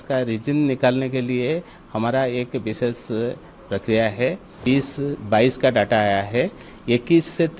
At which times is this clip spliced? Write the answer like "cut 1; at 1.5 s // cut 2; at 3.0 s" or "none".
cut 1; at 4.6 s